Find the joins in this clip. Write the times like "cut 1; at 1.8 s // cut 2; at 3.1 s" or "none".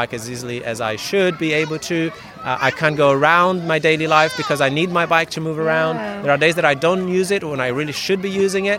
none